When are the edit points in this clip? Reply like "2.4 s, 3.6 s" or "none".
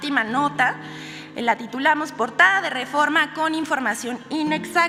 none